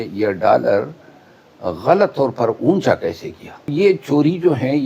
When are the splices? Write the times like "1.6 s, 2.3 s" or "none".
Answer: 3.7 s